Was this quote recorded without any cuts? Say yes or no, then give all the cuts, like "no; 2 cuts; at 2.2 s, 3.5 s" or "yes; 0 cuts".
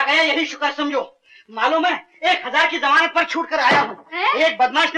yes; 0 cuts